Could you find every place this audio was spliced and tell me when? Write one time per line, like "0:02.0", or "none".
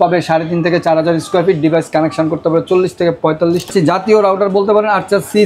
0:03.7